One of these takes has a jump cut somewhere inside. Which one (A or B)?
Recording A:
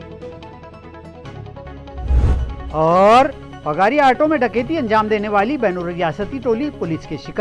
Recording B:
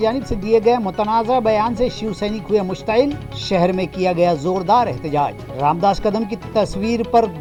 A